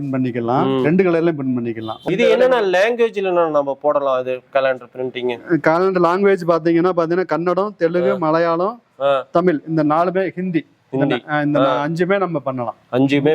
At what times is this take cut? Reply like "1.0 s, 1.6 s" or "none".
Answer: 2.0 s